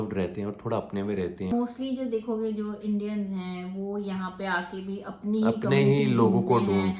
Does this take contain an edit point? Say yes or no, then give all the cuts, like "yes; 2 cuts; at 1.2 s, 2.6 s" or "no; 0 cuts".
no; 0 cuts